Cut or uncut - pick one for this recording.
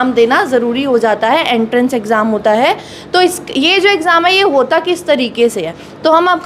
uncut